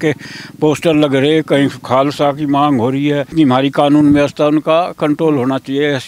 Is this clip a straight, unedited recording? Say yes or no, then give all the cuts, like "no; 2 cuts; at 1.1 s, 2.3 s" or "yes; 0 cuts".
no; 1 cut; at 3.3 s